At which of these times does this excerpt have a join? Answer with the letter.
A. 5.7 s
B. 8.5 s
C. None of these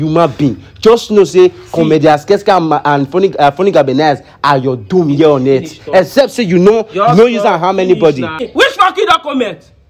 B